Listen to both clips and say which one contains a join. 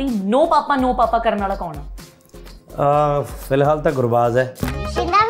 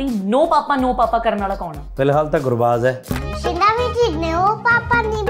second; 1 cut; at 1.8 s

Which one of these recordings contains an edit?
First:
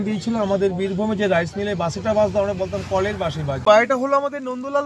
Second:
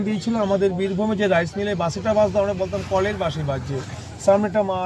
first; 1 cut; at 3.6 s

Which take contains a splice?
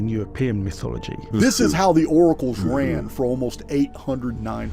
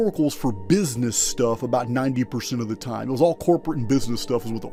first; 1 cut; at 1.1 s

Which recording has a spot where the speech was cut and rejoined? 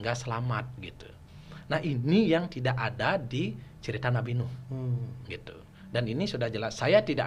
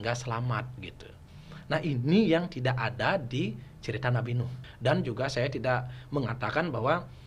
second; 1 cut; at 4.6 s

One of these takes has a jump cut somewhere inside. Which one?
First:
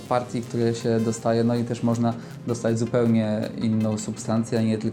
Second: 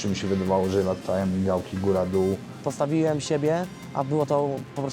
second; 1 cut; at 2.6 s

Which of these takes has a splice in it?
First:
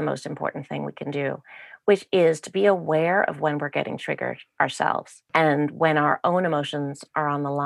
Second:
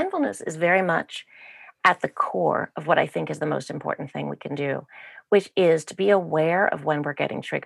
first; 1 cut; at 5.2 s

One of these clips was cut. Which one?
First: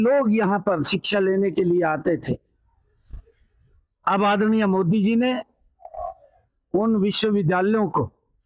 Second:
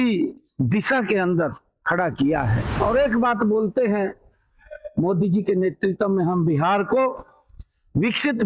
second; 1 cut; at 2.6 s

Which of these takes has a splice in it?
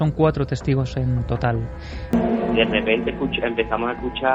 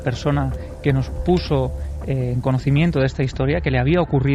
first; 1 cut; at 2.0 s

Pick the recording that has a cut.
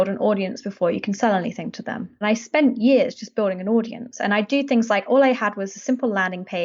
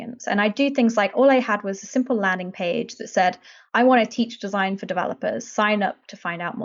first; 1 cut; at 2.2 s

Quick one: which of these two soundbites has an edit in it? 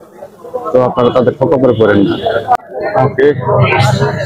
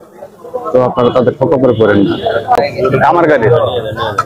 second; 1 cut; at 2.6 s

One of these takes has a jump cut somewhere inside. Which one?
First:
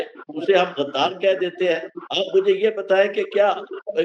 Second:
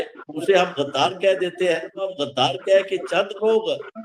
second; 1 cut; at 2.1 s

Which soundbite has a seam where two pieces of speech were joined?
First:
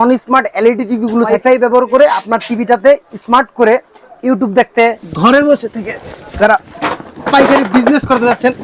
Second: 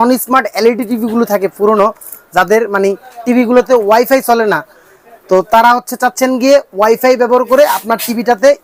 first; 2 cuts; at 1.3 s, 5.0 s

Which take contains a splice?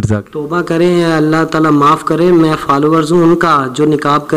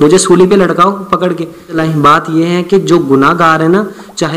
second; 1 cut; at 1.7 s

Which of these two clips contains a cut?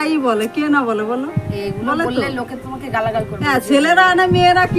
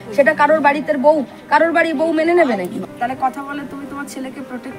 second; 1 cut; at 2.9 s

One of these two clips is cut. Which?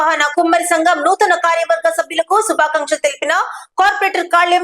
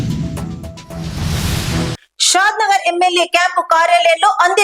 second; 1 cut; at 2.0 s

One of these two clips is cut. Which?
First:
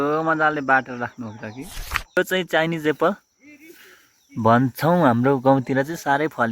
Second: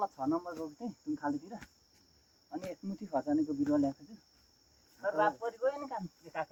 first; 1 cut; at 2.2 s

